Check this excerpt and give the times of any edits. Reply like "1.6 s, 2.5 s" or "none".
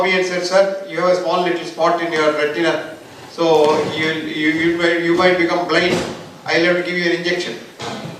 none